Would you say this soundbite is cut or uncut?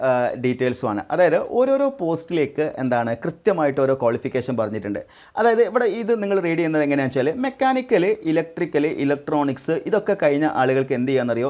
uncut